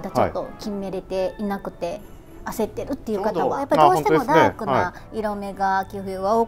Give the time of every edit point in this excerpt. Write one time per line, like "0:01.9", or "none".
0:03.6